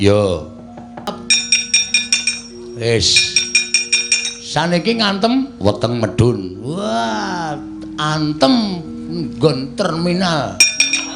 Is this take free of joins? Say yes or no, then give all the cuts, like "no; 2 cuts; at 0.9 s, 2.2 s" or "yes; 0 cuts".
no; 1 cut; at 1.1 s